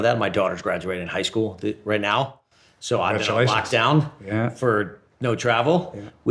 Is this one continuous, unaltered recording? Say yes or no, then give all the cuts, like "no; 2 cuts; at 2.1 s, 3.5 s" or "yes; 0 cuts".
yes; 0 cuts